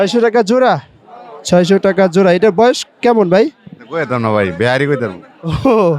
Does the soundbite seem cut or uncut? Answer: uncut